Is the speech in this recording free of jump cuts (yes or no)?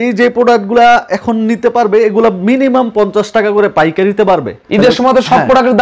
yes